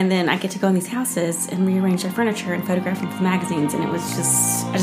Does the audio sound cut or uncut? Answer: uncut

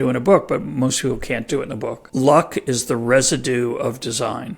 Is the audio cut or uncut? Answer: cut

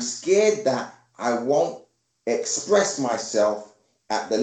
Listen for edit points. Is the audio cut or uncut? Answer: uncut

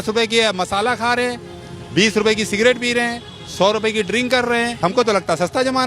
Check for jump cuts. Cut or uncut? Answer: cut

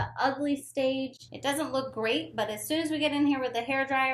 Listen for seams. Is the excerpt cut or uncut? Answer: cut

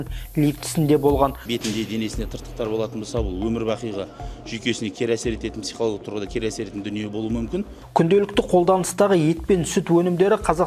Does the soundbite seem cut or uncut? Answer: cut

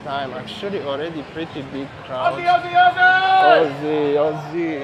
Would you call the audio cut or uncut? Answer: uncut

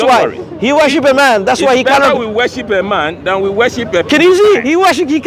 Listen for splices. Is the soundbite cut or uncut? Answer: uncut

